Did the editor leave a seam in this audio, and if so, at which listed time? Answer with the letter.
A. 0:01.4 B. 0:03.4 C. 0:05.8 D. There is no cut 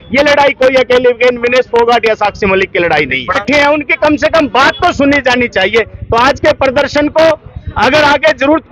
B